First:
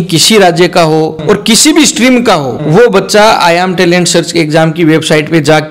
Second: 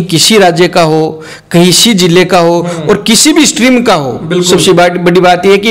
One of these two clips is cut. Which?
first; 2 cuts; at 1.2 s, 2.5 s

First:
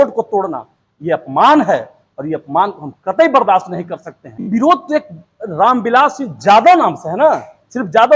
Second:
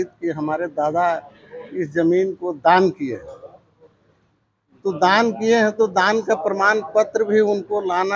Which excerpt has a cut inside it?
first; 1 cut; at 4.5 s

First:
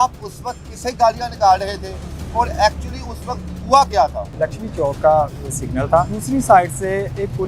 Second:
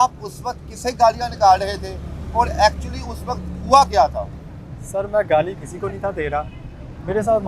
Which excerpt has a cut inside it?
first; 2 cuts; at 4.3 s, 6.2 s

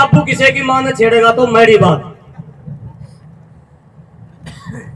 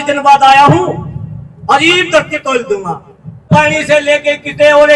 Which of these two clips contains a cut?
second; 1 cut; at 3.6 s

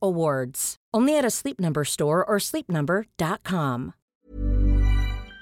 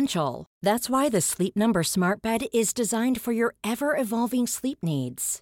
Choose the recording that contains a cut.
first; 1 cut; at 4.0 s

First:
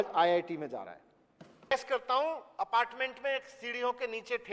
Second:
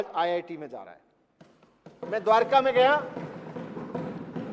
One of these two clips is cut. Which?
first; 1 cut; at 1.7 s

